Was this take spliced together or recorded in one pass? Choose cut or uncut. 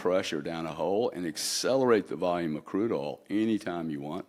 uncut